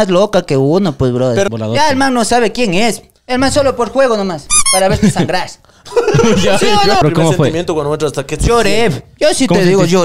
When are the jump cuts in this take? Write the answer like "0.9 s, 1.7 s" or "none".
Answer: 1.5 s, 7.0 s